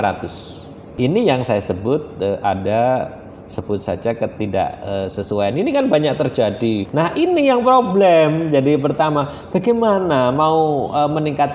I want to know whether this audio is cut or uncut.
cut